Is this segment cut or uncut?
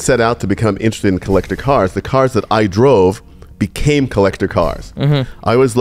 uncut